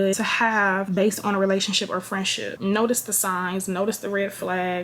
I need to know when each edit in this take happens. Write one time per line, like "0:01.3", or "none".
0:02.5